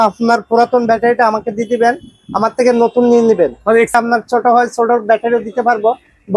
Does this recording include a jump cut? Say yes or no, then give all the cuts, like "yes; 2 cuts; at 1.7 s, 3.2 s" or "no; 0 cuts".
yes; 1 cut; at 3.9 s